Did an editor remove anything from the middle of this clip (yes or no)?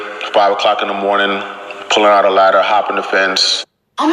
no